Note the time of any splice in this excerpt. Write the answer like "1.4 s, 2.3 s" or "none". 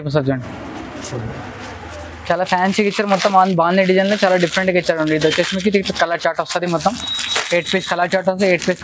none